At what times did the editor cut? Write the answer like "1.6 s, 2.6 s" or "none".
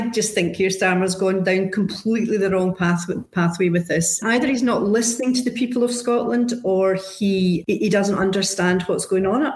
4.2 s, 7.6 s